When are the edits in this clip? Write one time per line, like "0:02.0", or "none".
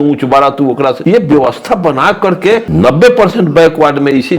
0:01.0
0:02.7